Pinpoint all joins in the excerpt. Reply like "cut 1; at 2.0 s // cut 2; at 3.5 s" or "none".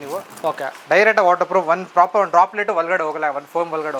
none